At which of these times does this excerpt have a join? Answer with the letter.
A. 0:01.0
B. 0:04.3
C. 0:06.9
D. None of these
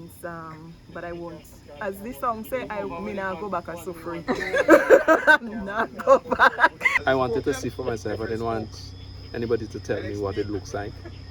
C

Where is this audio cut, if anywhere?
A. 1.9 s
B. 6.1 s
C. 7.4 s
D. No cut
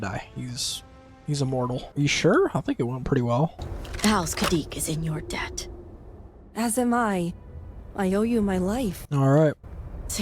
A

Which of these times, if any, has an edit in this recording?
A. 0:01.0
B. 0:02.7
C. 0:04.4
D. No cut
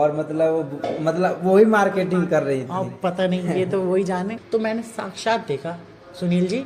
C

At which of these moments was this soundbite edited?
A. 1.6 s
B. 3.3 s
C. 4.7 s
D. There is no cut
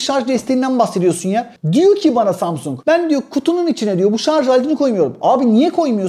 A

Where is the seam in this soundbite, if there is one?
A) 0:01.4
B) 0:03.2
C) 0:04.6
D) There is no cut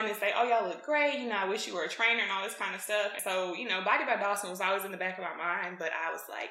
B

